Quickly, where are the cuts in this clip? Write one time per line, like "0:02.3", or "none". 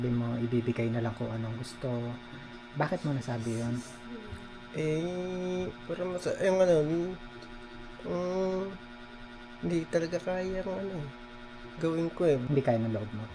0:12.4